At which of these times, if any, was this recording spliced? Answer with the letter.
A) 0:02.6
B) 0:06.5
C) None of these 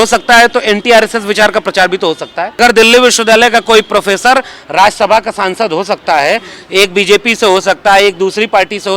A